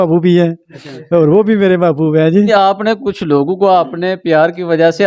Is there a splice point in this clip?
yes; 1 cut; at 2.5 s

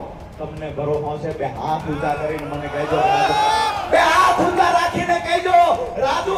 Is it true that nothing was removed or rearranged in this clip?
yes; 0 cuts

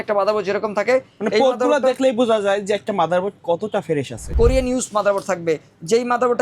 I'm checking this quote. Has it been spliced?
yes; 1 cut; at 4.3 s

